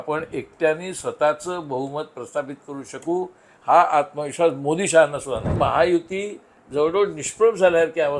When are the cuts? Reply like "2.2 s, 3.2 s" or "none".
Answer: 5.5 s